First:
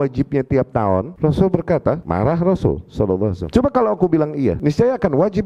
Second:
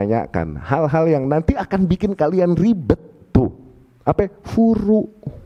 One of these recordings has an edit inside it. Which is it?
first; 4 cuts; at 1.1 s, 2.0 s, 3.4 s, 4.6 s

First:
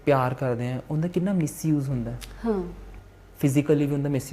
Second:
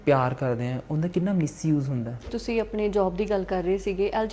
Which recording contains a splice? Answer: second; 1 cut; at 2.3 s

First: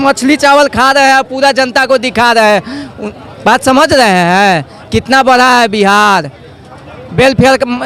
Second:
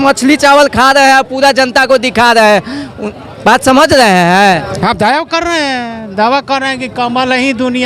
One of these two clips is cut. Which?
second; 1 cut; at 4.7 s

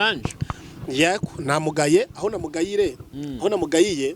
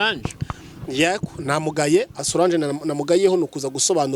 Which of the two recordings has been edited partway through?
second; 1 cut; at 2.2 s

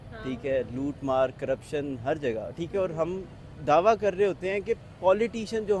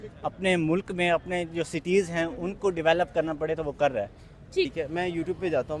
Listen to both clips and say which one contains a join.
second; 1 cut; at 4.7 s

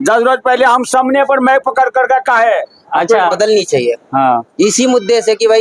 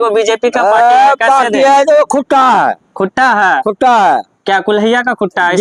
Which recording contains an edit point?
first; 1 cut; at 3.3 s

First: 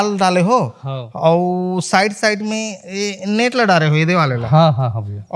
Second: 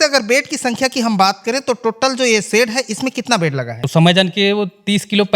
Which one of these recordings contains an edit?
second; 1 cut; at 3.9 s

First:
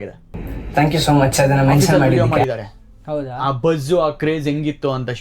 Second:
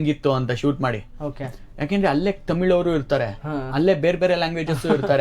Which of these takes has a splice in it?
first; 1 cut; at 2.2 s

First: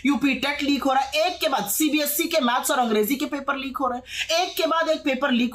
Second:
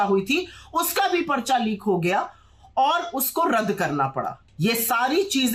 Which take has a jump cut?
second; 1 cut; at 4.4 s

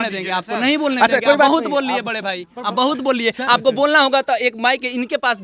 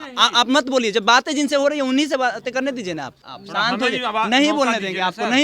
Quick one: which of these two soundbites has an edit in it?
second; 1 cut; at 3.2 s

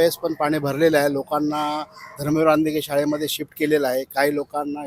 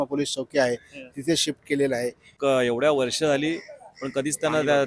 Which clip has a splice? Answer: second; 1 cut; at 2.3 s

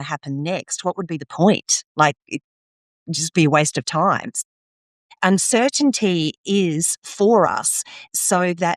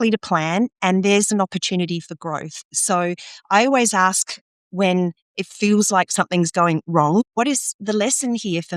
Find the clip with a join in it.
second; 1 cut; at 7.2 s

